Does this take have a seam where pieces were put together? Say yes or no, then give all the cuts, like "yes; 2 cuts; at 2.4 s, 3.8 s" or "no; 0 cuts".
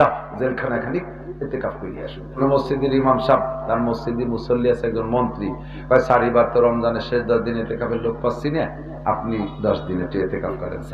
yes; 1 cut; at 2.4 s